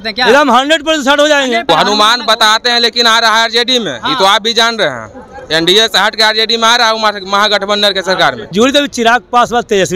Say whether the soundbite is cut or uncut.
cut